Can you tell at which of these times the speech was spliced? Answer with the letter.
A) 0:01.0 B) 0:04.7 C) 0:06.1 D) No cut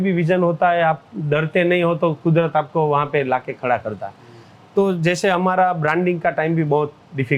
D